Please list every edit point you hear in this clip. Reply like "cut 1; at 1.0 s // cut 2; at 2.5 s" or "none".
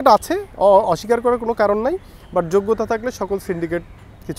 none